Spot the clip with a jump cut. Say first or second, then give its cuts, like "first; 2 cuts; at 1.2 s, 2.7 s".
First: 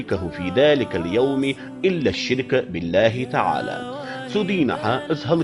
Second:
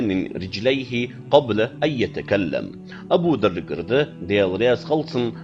second; 1 cut; at 3.2 s